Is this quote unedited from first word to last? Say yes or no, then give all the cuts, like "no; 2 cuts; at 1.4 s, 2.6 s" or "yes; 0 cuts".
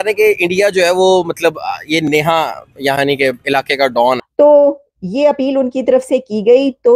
no; 1 cut; at 4.3 s